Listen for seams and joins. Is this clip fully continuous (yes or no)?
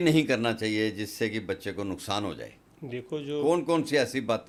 yes